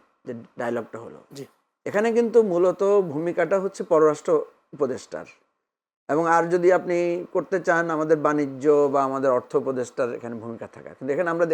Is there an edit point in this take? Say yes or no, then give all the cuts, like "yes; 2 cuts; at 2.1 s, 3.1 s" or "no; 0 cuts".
no; 0 cuts